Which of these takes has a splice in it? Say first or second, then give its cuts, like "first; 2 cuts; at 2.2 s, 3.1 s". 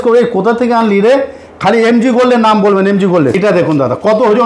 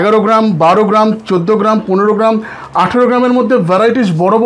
first; 1 cut; at 3.4 s